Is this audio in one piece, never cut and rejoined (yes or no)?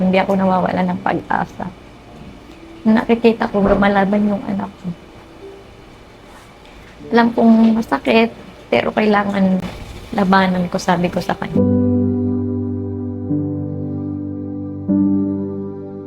no